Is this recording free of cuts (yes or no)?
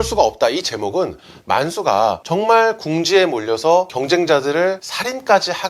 yes